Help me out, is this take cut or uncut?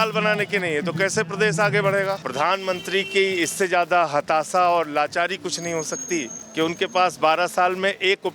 cut